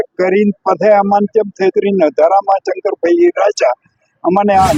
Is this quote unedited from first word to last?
yes; 0 cuts

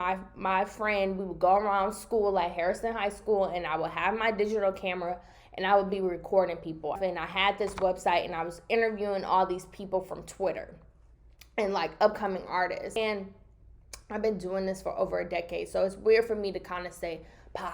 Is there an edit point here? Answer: yes; 2 cuts; at 7.0 s, 13.0 s

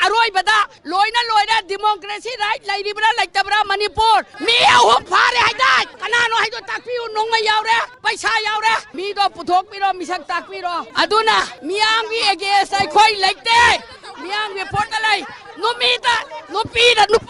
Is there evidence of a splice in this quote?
yes; 4 cuts; at 4.4 s, 7.9 s, 8.9 s, 10.9 s

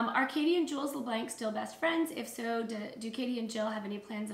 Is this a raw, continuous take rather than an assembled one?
yes; 0 cuts

